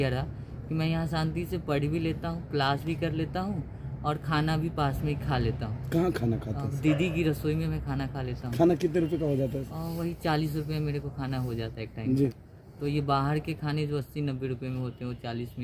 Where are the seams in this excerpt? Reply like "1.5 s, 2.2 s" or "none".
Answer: none